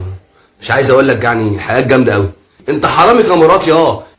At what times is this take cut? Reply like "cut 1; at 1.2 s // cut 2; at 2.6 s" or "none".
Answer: cut 1; at 2.6 s